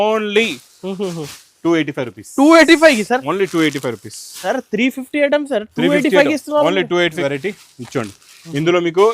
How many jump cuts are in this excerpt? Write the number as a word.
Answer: one